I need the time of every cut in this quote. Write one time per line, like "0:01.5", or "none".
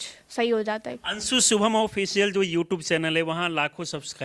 0:00.9